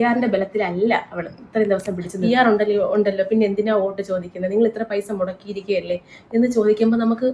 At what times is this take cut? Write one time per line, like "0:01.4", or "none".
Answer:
0:02.1